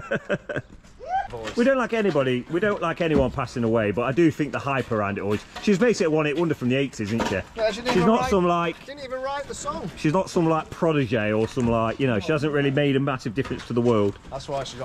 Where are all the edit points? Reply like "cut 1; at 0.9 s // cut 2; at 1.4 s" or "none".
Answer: cut 1; at 1.3 s